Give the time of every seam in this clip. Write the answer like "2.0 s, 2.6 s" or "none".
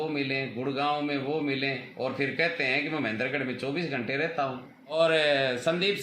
4.9 s